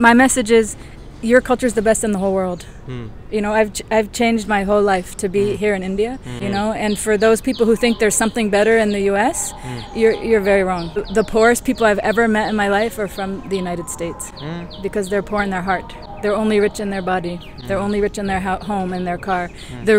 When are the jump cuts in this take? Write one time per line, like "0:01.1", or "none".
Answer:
0:06.4
0:11.1
0:16.0

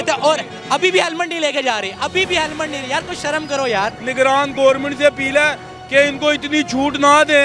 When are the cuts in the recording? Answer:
0:04.0

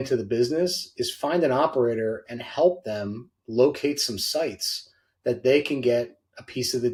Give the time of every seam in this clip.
none

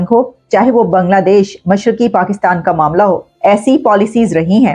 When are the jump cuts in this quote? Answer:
0:03.3

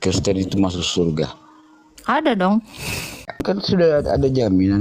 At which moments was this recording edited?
0:03.6

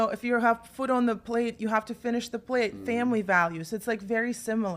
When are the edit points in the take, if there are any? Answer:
0:01.5

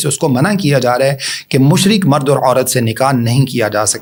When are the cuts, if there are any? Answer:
none

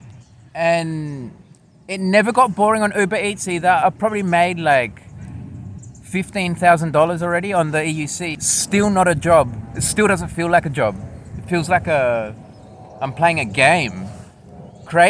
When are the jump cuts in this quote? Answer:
0:08.4

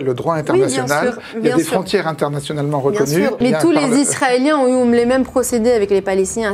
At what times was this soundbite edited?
0:03.4

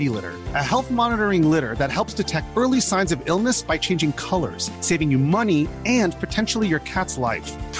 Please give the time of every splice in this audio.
none

